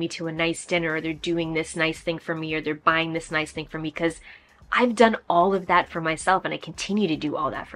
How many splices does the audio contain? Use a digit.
0